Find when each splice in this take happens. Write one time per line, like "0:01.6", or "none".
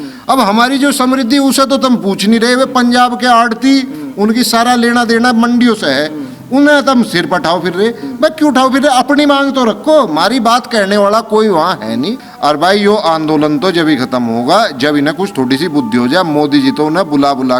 0:12.2